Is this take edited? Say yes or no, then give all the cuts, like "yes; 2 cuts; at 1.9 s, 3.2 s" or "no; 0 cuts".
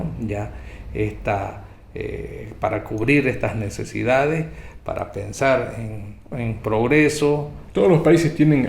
yes; 1 cut; at 7.6 s